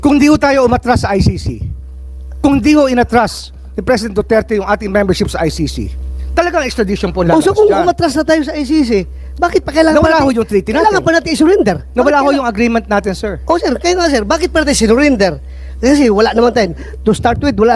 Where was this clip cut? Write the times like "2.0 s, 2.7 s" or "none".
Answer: none